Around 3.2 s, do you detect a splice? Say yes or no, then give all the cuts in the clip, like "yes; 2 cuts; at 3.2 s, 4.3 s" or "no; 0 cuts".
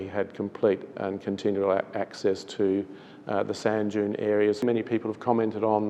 no; 1 cut; at 4.6 s